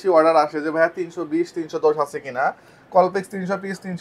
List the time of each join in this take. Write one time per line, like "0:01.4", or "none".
none